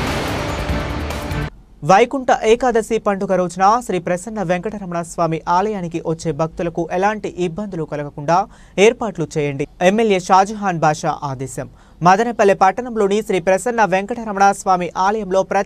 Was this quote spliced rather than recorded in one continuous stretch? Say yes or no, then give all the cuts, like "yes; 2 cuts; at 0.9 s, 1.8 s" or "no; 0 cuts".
yes; 1 cut; at 1.3 s